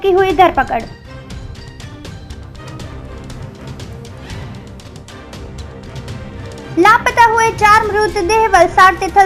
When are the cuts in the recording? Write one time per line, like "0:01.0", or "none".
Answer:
none

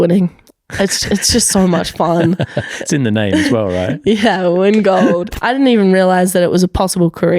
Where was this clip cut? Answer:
0:05.3

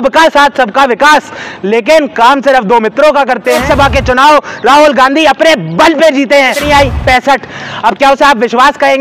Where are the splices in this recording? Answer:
0:03.6
0:06.6

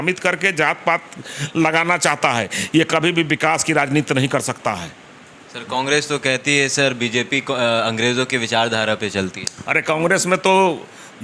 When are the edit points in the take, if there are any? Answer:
none

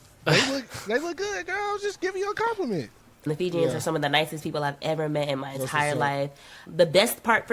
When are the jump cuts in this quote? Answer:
0:03.3
0:06.6

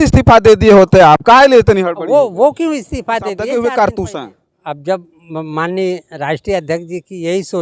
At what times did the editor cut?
0:03.4

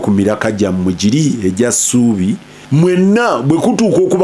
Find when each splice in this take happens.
0:02.5

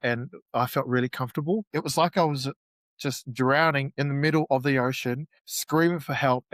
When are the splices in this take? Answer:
0:01.7

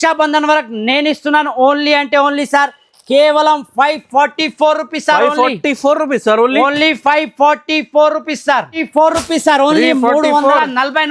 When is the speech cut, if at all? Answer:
0:08.8

